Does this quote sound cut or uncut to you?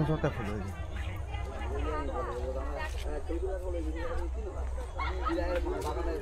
cut